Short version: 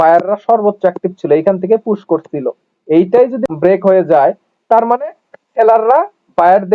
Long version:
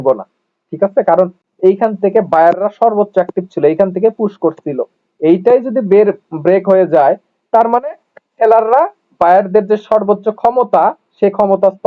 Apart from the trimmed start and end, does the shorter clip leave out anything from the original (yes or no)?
yes